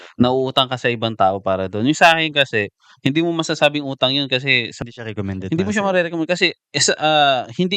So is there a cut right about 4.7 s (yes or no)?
yes